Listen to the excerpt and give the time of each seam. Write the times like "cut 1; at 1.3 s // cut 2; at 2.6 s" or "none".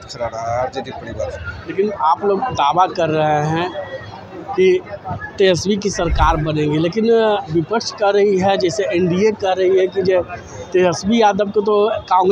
none